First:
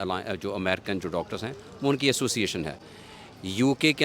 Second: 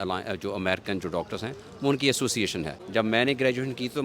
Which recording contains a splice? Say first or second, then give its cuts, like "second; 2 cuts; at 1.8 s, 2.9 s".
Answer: second; 1 cut; at 2.8 s